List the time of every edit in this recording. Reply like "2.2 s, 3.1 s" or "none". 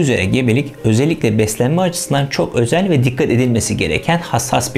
none